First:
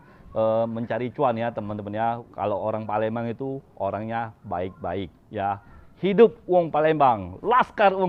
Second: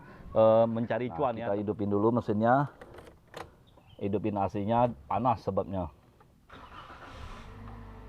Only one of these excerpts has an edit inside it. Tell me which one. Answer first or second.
second